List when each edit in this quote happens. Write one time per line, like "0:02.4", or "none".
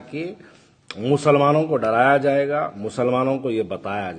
none